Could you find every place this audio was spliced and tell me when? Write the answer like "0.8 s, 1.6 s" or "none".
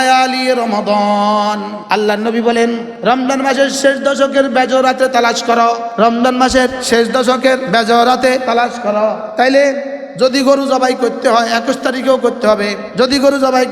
1.7 s, 2.9 s, 5.9 s, 6.8 s, 7.6 s, 8.7 s, 12.8 s